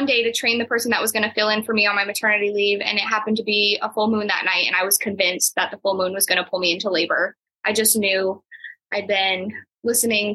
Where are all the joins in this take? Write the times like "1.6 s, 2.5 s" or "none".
none